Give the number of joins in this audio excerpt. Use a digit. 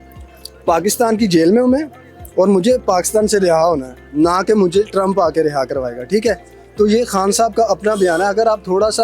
0